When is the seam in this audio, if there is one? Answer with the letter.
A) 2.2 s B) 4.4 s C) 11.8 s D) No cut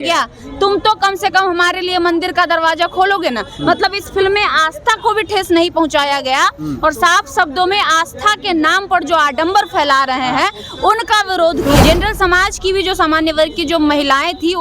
C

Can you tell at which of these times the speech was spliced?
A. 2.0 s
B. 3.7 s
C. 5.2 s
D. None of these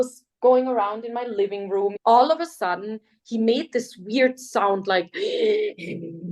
A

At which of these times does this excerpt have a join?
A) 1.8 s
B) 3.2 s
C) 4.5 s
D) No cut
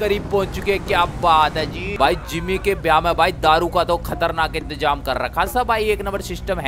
A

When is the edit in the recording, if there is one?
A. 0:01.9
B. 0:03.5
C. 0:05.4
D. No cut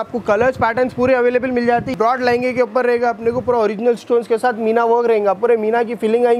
A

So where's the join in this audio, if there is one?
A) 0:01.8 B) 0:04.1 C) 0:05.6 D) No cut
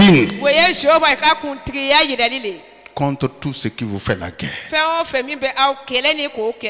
D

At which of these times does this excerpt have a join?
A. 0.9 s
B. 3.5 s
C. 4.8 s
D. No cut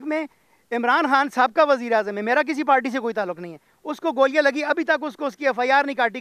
D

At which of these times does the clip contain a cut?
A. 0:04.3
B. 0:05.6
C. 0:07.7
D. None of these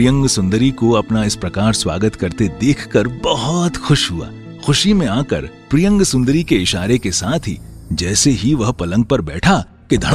D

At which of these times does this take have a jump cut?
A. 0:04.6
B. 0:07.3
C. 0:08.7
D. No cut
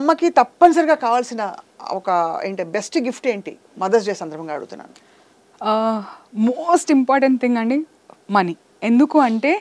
C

